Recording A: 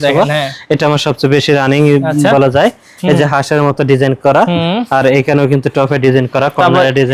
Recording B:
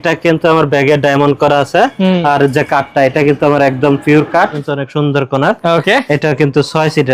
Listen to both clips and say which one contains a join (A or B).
B